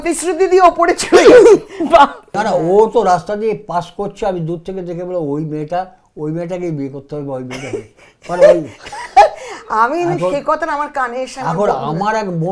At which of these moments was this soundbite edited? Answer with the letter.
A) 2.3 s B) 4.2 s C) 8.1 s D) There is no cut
A